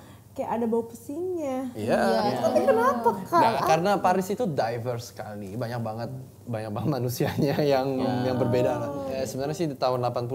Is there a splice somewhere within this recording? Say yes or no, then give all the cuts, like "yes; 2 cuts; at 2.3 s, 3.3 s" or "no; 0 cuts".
yes; 2 cuts; at 2.4 s, 9.1 s